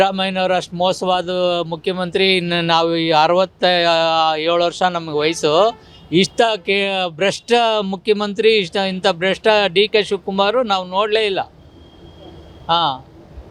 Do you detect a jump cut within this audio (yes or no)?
no